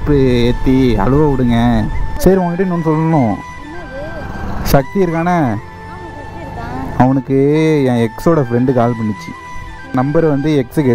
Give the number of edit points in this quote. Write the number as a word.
two